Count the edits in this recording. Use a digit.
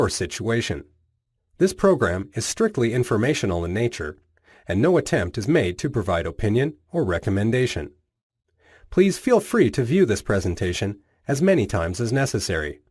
1